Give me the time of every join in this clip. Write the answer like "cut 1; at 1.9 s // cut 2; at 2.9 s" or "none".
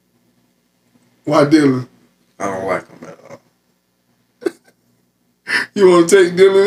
none